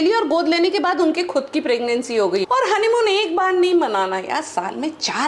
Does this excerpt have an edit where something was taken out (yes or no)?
yes